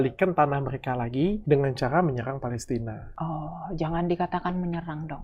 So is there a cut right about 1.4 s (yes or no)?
yes